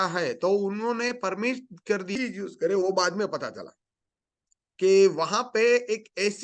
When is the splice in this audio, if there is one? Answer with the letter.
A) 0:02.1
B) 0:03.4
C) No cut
A